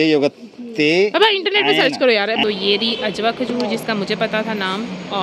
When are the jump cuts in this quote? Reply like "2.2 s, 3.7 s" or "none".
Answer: 2.4 s